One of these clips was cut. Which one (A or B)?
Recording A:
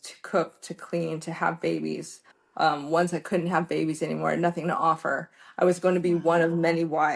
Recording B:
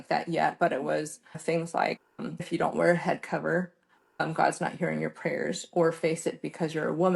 B